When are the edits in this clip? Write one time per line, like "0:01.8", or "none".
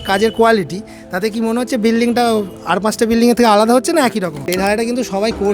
0:04.4